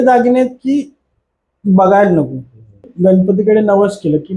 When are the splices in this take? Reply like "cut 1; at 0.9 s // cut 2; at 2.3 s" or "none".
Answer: cut 1; at 2.9 s